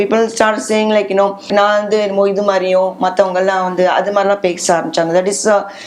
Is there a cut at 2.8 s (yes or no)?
no